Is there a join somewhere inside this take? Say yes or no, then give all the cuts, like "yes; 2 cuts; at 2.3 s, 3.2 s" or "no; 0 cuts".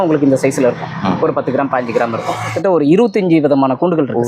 yes; 1 cut; at 2.5 s